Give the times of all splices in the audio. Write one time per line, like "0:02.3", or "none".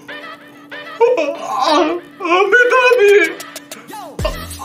none

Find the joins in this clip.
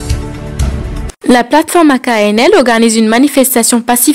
0:01.1

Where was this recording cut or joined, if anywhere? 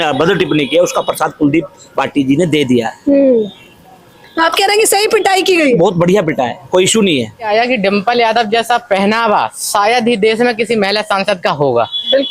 0:07.5

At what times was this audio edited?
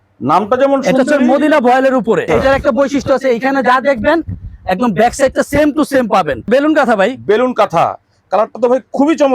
0:02.3
0:06.5

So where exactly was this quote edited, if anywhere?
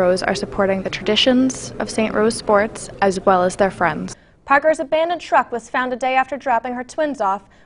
0:04.1

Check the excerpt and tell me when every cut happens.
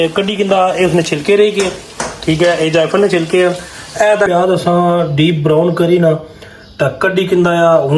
0:04.3

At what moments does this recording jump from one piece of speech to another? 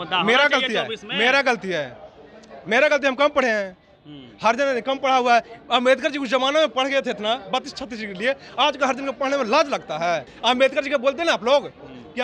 0:10.3

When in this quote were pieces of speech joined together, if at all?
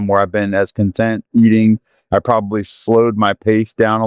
none

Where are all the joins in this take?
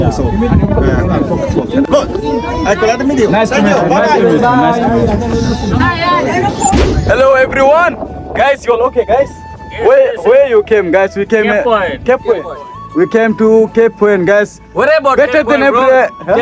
0:02.3
0:06.8

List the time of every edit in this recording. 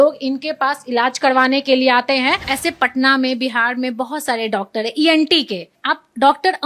0:02.5
0:05.7

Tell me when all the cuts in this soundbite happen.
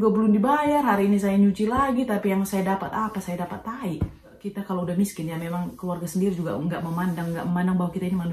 0:04.5

